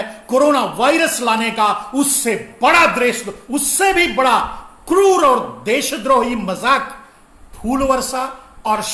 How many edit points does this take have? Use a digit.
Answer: 0